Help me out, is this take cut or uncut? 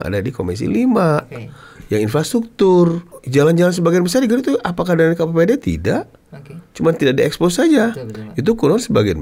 cut